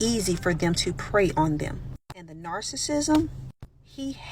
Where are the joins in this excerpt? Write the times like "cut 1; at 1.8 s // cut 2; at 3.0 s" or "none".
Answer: cut 1; at 2.0 s // cut 2; at 3.5 s